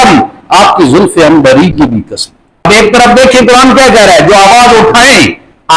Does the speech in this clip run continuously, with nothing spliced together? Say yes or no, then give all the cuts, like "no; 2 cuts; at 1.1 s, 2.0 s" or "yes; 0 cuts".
no; 1 cut; at 2.7 s